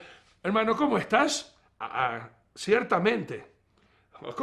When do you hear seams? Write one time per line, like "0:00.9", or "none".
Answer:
none